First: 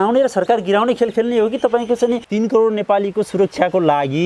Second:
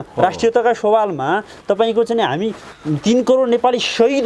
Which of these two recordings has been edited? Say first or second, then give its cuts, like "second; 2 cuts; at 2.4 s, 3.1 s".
first; 1 cut; at 2.3 s